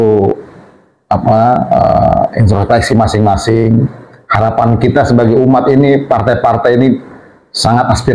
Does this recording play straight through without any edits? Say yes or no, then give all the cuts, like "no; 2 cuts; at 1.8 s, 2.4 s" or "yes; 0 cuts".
yes; 0 cuts